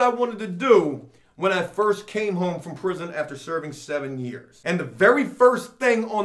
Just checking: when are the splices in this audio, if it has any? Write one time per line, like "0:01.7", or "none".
0:04.5